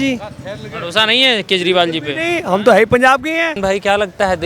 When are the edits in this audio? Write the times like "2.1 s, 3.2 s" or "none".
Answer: 3.6 s